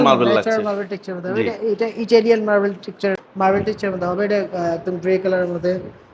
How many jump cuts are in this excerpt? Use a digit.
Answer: 1